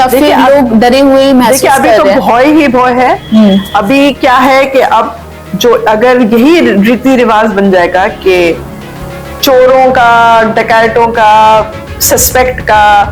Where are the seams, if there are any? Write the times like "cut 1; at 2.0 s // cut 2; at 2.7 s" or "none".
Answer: none